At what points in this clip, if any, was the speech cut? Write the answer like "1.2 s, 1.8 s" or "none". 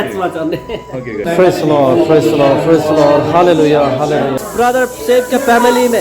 1.2 s, 4.4 s

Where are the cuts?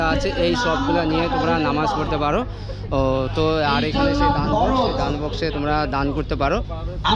none

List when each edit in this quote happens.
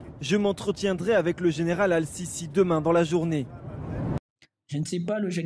none

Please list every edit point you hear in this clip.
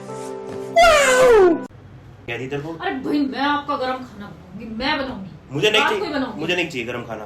2.3 s

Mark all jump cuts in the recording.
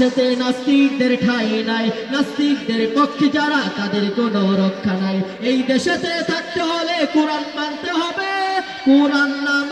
none

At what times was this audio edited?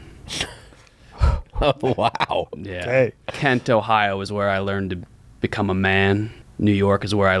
6.4 s

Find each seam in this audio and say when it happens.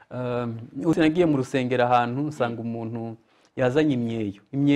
0.9 s

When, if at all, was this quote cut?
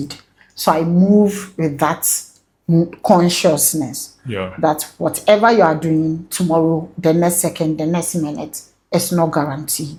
none

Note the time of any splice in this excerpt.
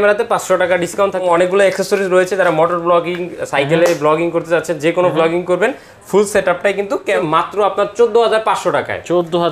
1.2 s, 7.0 s

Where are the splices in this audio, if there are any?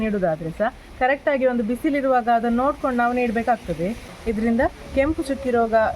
4.1 s

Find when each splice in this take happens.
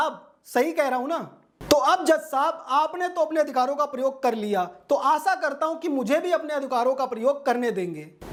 none

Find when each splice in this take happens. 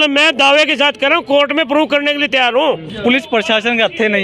2.9 s

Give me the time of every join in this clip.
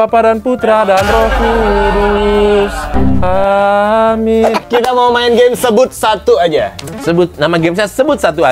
4.6 s

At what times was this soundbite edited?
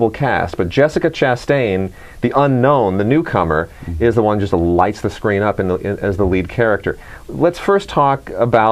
4.6 s

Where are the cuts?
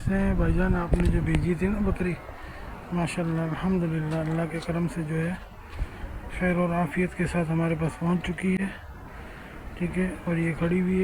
none

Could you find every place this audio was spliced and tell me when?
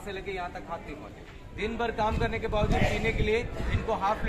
1.4 s

